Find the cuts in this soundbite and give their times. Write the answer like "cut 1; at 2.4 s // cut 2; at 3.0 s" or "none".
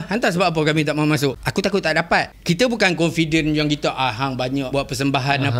cut 1; at 1.4 s // cut 2; at 2.4 s // cut 3; at 4.7 s